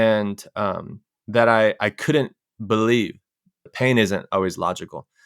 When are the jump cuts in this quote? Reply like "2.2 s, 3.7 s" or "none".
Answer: 3.7 s